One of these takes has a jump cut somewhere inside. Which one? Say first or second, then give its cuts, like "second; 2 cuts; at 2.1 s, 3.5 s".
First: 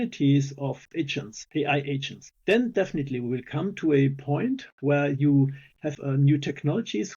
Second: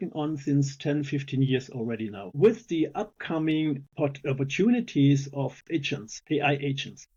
first; 1 cut; at 5.9 s